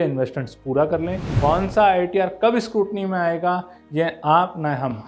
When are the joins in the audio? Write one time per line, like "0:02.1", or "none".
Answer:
0:01.2